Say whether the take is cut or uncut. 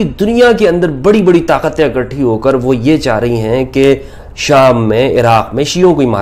uncut